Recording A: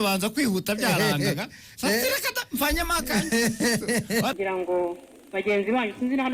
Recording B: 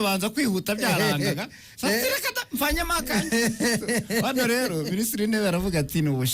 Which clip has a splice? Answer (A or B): A